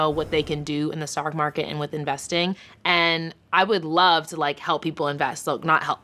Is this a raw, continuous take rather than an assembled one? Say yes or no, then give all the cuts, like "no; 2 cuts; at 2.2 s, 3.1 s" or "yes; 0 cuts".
no; 1 cut; at 2.7 s